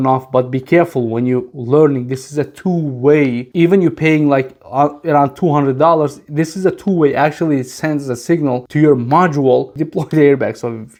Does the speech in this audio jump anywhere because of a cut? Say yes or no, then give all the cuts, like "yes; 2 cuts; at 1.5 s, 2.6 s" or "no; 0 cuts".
no; 0 cuts